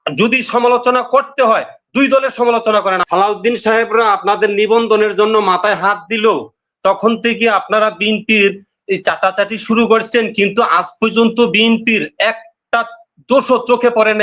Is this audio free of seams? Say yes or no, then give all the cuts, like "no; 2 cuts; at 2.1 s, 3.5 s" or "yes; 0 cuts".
no; 1 cut; at 3.0 s